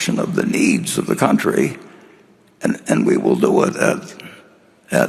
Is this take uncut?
yes; 0 cuts

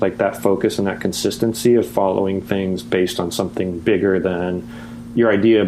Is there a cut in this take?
no; 0 cuts

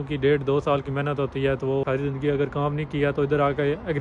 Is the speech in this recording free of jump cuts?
no; 1 cut; at 1.8 s

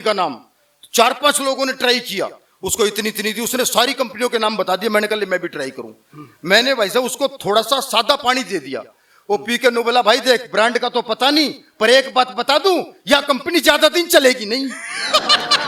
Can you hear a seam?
no; 0 cuts

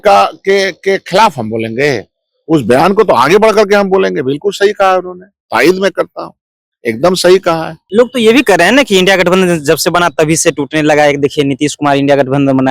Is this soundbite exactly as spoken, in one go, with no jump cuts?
no; 1 cut; at 7.8 s

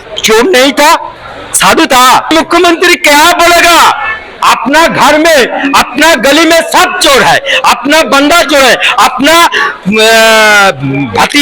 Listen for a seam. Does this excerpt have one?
yes; 1 cut; at 2.3 s

